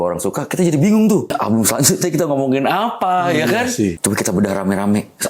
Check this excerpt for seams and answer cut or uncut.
cut